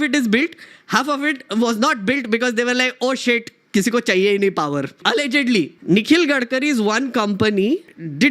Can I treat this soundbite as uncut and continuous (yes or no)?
no